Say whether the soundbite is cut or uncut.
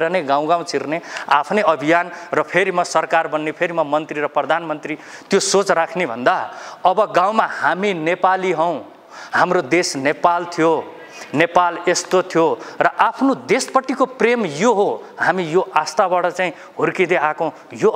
uncut